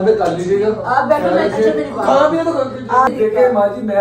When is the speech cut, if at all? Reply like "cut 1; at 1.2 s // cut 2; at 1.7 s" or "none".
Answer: cut 1; at 3.1 s